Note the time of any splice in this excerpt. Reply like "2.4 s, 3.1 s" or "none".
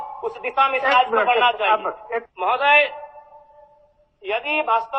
2.3 s